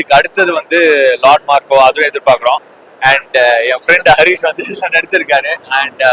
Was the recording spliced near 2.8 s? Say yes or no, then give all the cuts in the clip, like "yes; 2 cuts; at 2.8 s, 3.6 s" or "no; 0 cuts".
no; 0 cuts